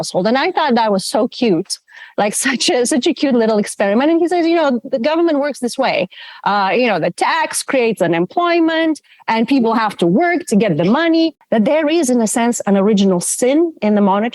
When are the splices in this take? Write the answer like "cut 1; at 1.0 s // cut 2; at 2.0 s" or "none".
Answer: cut 1; at 11.4 s